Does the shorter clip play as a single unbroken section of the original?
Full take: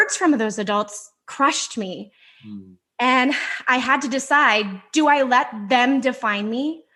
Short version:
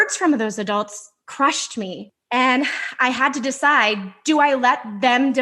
no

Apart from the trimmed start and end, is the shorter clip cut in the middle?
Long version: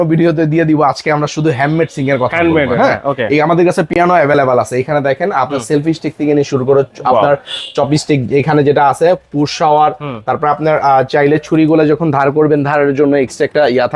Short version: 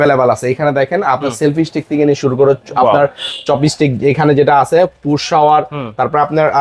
no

